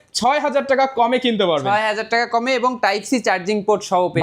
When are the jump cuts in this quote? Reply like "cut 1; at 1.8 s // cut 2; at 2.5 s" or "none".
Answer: none